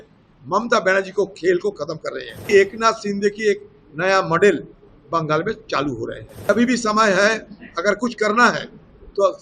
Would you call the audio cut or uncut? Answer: cut